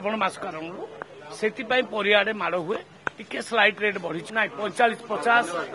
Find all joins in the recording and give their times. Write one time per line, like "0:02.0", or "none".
0:04.2